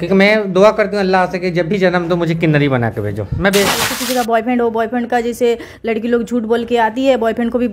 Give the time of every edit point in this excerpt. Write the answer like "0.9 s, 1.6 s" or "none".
3.9 s